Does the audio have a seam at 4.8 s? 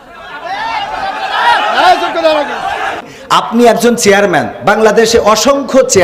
no; 1 cut; at 3.1 s

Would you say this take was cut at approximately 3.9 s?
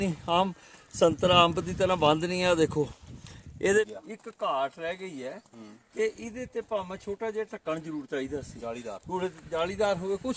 yes; 1 cut; at 3.9 s

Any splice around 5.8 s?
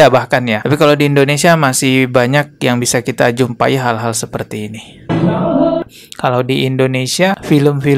yes; 1 cut; at 5.8 s

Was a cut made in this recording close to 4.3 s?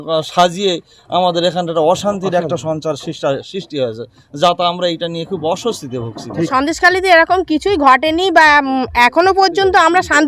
no; 1 cut; at 6.5 s

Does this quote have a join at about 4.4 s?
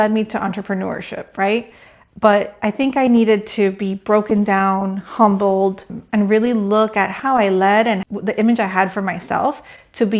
no; 3 cuts; at 5.9 s, 7.1 s, 8.0 s

